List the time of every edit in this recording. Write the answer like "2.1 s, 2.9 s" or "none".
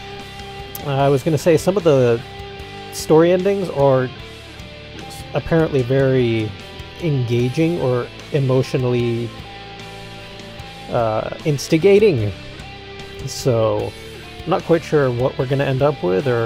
7.1 s